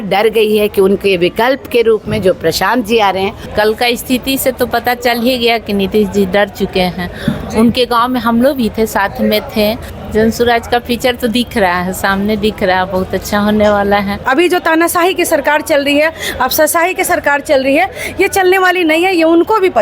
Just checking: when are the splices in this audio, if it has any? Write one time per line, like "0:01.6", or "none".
0:03.4
0:09.9
0:14.2

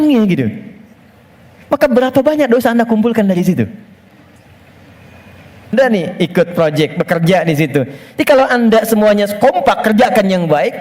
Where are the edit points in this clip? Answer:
0:05.7

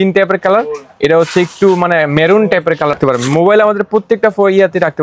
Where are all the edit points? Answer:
0:03.0

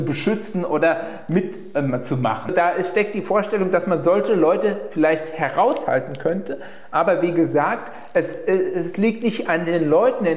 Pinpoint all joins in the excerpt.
0:02.5

